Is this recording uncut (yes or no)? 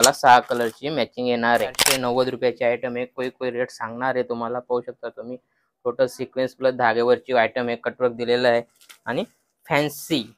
no